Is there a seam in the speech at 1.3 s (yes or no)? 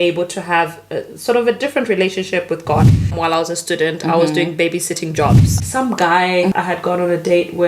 no